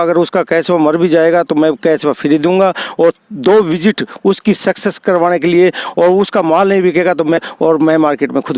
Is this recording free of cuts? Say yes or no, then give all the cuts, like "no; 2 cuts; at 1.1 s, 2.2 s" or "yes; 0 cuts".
no; 1 cut; at 7.4 s